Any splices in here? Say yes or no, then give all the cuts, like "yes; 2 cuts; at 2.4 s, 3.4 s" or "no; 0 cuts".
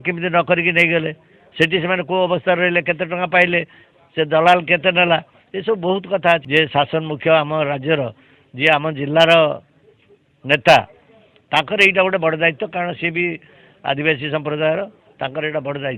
yes; 1 cut; at 6.4 s